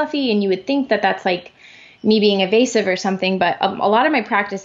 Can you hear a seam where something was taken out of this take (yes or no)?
no